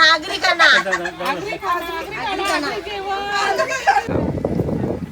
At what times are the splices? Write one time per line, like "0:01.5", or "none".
0:04.1